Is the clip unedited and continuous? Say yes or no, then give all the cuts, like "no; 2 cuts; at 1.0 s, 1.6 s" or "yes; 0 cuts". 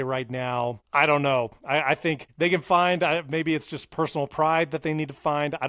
no; 2 cuts; at 0.8 s, 2.3 s